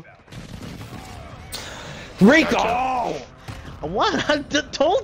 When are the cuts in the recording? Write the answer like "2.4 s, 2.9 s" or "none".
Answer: none